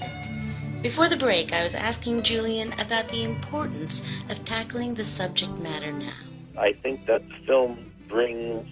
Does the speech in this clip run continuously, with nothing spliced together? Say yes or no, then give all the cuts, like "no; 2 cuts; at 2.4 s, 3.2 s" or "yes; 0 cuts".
no; 1 cut; at 4.8 s